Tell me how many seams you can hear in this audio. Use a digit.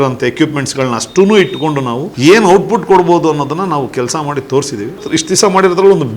2